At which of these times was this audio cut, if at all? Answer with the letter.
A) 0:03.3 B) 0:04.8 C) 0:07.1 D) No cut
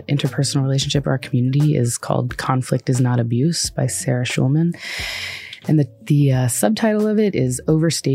D